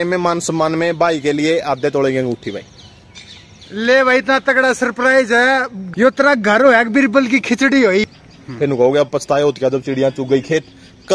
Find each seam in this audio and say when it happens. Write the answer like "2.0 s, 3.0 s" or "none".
5.8 s, 8.0 s